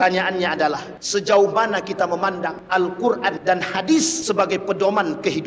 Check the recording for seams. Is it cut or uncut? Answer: cut